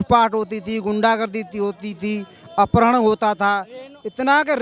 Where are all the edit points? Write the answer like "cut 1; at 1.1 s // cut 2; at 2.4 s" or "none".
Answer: none